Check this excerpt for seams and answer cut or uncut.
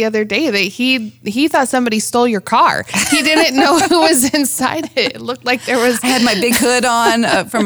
uncut